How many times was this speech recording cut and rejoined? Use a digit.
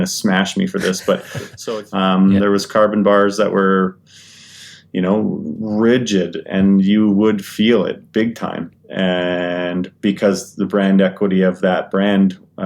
1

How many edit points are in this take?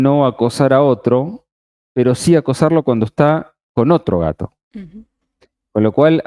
0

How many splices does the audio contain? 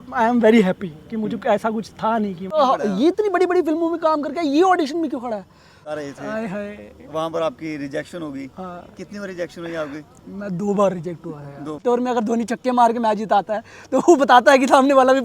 3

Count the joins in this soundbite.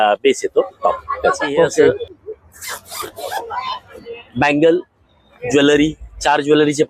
1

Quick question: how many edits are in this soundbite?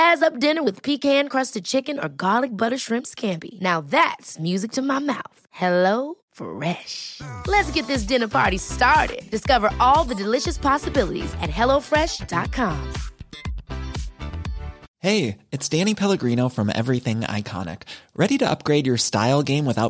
1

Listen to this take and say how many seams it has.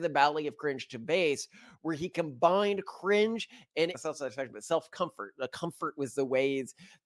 1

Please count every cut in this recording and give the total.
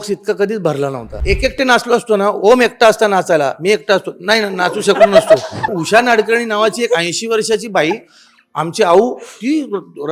2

